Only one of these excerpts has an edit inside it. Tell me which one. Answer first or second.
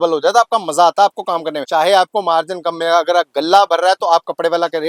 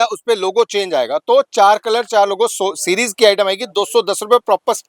first